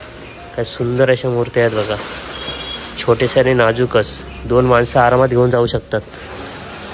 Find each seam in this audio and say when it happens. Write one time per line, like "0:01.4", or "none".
none